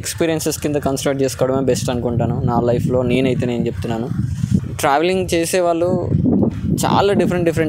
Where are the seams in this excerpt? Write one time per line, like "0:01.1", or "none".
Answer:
0:04.6